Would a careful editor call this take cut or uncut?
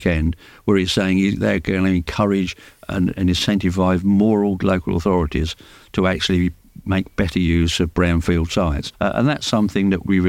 uncut